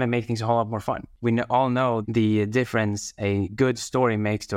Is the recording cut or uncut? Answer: cut